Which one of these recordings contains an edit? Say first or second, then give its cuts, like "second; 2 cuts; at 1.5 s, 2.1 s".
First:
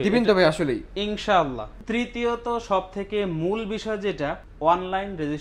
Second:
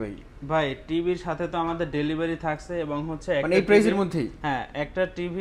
first; 2 cuts; at 1.7 s, 4.5 s